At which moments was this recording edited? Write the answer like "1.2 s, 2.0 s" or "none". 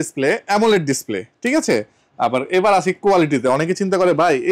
none